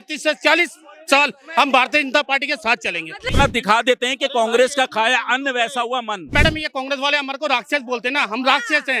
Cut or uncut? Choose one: cut